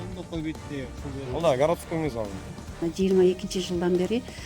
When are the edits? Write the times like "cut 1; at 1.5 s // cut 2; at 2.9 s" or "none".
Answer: cut 1; at 2.8 s